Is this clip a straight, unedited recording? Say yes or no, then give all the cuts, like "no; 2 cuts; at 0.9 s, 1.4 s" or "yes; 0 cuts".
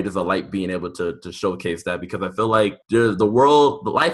no; 1 cut; at 2.8 s